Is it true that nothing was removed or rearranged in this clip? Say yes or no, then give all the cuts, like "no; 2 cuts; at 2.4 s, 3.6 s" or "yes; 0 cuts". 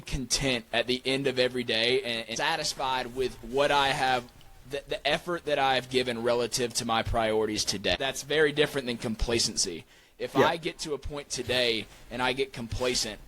no; 2 cuts; at 2.3 s, 8.0 s